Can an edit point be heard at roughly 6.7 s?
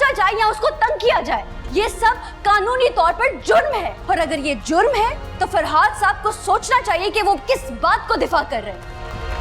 no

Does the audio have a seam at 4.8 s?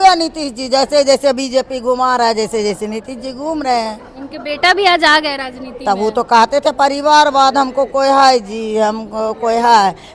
no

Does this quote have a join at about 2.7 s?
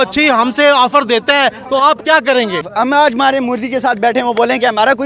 yes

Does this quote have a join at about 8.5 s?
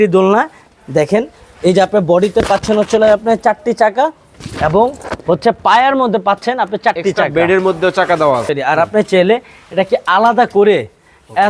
yes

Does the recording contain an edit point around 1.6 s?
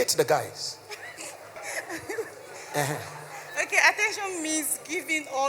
yes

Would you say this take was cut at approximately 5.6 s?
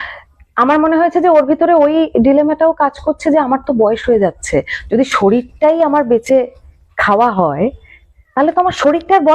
no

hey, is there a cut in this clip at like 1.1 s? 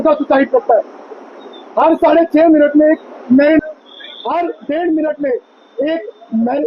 no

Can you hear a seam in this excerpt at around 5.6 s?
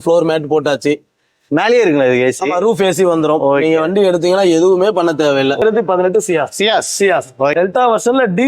yes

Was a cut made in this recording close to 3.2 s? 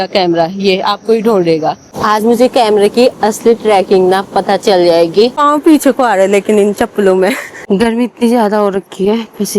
no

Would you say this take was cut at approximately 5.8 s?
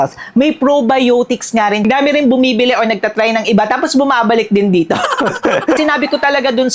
yes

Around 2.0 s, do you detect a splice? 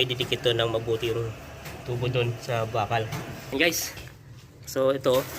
no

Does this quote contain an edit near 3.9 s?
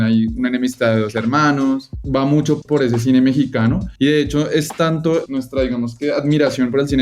yes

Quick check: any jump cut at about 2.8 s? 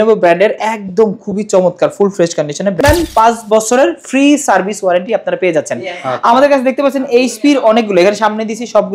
yes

